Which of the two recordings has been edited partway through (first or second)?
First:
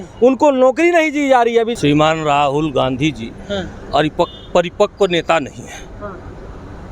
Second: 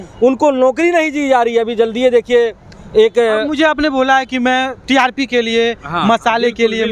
first